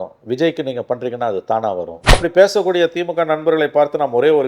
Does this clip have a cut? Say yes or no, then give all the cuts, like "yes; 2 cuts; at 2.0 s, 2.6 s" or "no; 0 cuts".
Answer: yes; 1 cut; at 2.2 s